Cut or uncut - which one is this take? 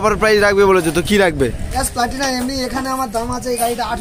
cut